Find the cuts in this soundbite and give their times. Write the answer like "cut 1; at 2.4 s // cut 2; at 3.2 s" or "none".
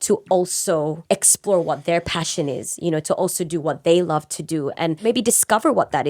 cut 1; at 1.0 s // cut 2; at 5.0 s